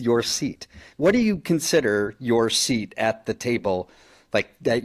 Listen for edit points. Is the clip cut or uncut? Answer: uncut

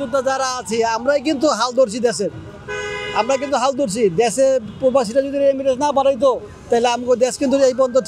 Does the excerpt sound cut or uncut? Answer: uncut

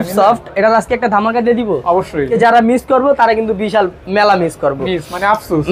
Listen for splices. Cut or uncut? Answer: cut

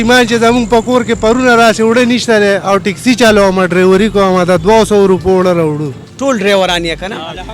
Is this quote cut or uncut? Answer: cut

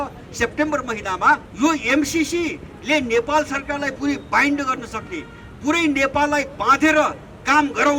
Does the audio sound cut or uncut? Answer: cut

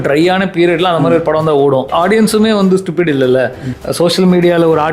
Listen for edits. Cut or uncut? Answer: cut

